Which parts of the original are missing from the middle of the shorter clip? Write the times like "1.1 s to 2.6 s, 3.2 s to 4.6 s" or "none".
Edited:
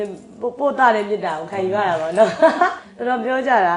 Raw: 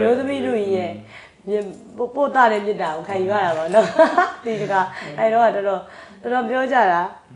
4.4 s to 6.1 s